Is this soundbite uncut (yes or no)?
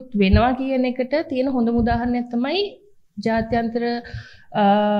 yes